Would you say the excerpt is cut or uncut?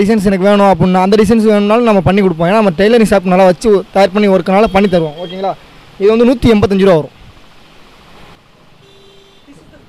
uncut